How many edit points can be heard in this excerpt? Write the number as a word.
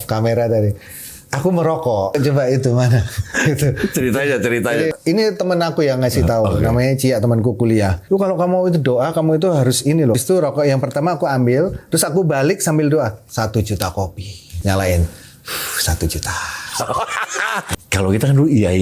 six